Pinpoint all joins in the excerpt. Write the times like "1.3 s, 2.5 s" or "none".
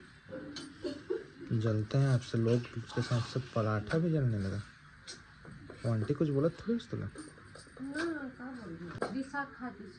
9.0 s